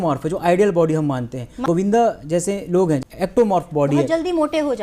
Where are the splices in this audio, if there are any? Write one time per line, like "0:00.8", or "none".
0:01.6
0:03.0